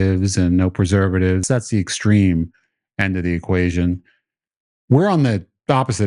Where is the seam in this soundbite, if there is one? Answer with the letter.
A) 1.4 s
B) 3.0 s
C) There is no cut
A